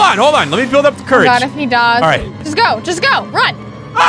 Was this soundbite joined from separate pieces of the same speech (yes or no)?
yes